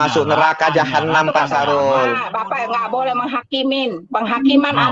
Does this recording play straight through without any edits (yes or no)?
yes